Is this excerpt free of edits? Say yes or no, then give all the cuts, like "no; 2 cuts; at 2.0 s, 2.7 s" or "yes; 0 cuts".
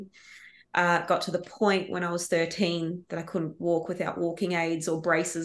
yes; 0 cuts